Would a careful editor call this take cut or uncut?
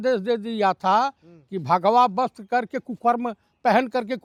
uncut